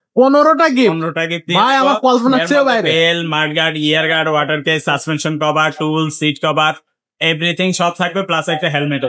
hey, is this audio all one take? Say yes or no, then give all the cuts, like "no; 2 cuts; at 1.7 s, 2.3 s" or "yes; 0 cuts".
yes; 0 cuts